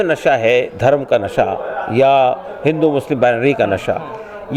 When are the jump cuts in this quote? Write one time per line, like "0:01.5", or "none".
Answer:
none